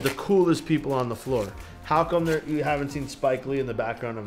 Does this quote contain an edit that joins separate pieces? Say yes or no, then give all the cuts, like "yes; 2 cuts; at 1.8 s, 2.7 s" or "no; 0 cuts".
no; 0 cuts